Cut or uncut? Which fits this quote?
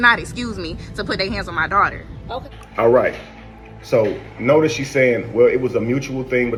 uncut